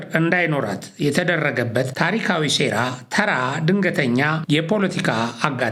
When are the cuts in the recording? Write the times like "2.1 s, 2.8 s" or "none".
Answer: none